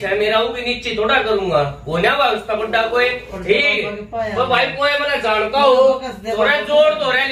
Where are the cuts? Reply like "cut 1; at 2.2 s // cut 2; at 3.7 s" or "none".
cut 1; at 3.3 s